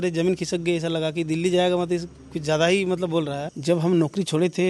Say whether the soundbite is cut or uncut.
cut